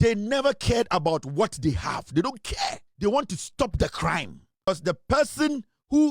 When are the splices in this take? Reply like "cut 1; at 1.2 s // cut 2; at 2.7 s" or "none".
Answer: cut 1; at 2.8 s // cut 2; at 4.7 s